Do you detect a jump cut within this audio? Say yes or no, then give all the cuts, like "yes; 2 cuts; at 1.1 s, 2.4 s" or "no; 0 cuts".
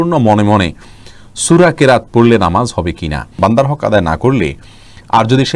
yes; 1 cut; at 3.3 s